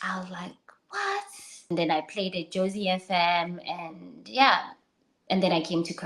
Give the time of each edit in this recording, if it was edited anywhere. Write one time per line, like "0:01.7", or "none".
0:01.7